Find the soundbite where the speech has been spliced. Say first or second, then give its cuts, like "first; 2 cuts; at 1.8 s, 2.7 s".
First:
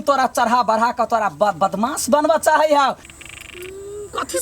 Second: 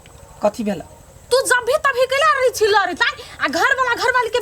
first; 1 cut; at 3.0 s